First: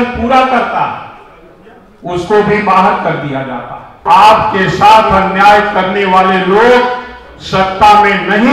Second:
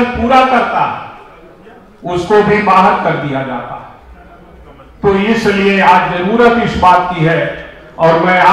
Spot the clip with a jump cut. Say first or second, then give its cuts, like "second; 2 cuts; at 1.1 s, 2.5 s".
first; 1 cut; at 4.0 s